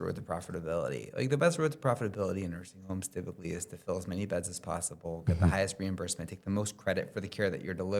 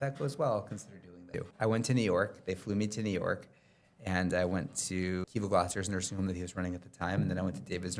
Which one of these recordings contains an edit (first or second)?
second